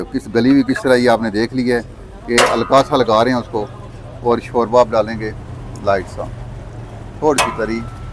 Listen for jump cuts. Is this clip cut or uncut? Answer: uncut